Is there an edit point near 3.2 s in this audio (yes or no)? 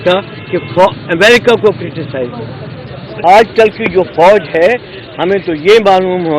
yes